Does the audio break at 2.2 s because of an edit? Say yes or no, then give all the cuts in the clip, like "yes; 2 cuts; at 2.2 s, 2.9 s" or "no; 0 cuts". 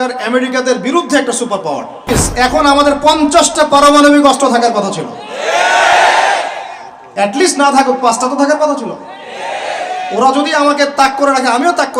yes; 1 cut; at 2.2 s